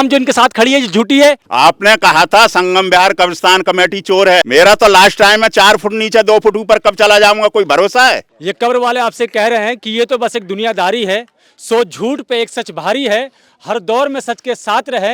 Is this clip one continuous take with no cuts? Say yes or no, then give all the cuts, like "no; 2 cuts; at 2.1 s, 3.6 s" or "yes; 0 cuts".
no; 3 cuts; at 1.5 s, 4.5 s, 8.3 s